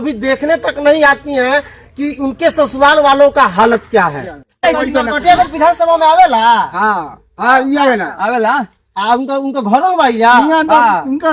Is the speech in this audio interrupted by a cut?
yes; 1 cut; at 4.6 s

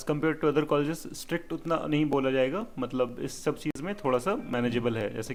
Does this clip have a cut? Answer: no; 0 cuts

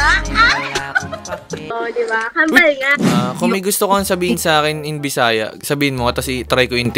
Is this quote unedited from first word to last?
no; 1 cut; at 2.9 s

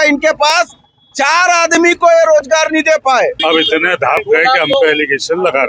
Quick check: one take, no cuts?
no; 1 cut; at 3.4 s

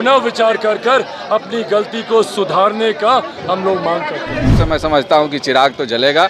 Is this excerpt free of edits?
no; 1 cut; at 4.5 s

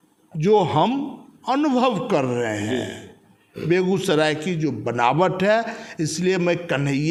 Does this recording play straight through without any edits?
yes; 0 cuts

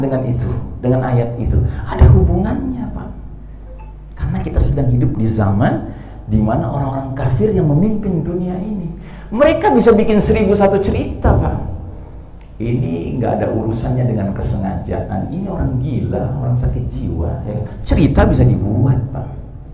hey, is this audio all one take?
yes; 0 cuts

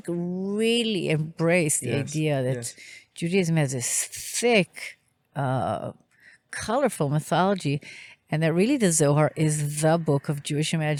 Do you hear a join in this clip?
no; 0 cuts

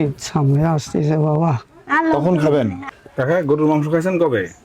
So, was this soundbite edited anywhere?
yes; 1 cut; at 2.8 s

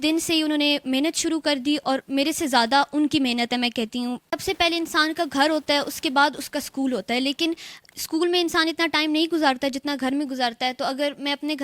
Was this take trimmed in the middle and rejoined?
yes; 1 cut; at 4.3 s

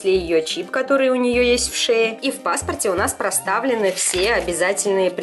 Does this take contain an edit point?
no; 0 cuts

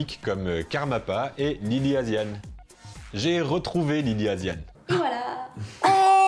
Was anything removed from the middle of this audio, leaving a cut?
no; 0 cuts

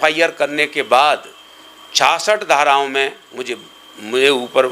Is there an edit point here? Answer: no; 0 cuts

